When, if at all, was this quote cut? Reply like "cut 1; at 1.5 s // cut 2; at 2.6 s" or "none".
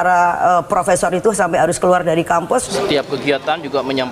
cut 1; at 2.7 s